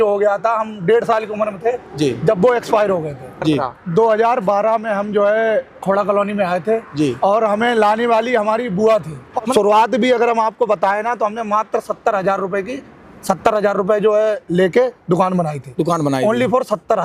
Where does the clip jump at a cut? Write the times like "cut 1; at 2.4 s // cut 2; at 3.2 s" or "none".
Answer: cut 1; at 3.7 s // cut 2; at 9.5 s